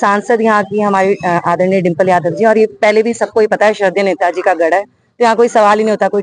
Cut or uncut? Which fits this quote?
uncut